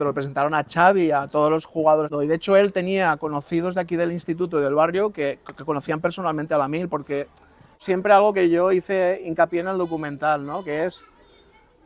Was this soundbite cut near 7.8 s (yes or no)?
yes